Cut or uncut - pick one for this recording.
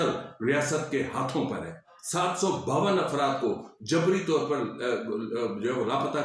cut